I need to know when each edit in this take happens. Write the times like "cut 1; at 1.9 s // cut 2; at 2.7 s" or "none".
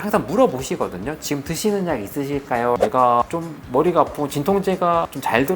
cut 1; at 2.8 s